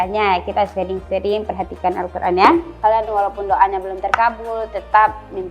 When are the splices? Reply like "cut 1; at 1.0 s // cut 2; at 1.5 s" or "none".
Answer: cut 1; at 2.7 s